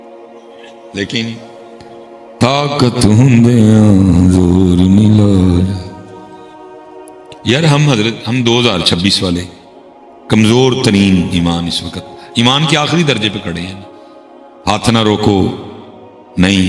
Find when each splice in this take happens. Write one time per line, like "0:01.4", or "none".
0:00.9